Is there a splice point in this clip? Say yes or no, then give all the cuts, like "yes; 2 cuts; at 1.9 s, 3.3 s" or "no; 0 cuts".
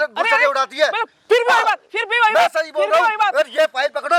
no; 0 cuts